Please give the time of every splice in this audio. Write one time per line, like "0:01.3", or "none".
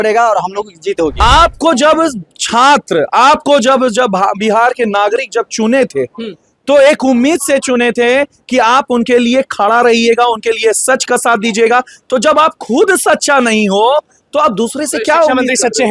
0:01.2